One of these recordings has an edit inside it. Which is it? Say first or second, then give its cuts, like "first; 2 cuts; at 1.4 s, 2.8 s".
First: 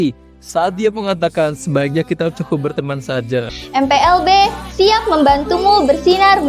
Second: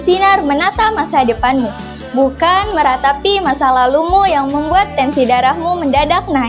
first; 1 cut; at 3.6 s